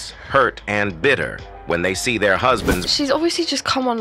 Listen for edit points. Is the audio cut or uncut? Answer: cut